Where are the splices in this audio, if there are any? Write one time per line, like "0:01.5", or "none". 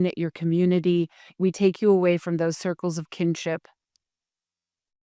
0:01.3